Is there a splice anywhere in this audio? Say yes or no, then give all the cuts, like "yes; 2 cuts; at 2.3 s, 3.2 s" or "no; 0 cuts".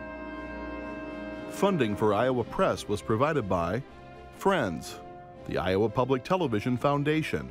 yes; 1 cut; at 1.6 s